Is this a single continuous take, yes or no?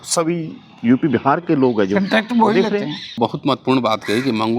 no